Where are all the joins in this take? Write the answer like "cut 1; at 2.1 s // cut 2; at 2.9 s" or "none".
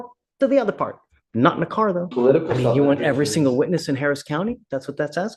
cut 1; at 2.1 s